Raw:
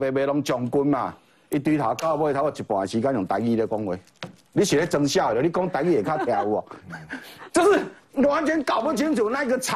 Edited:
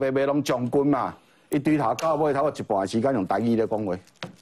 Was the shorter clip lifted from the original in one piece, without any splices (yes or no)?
yes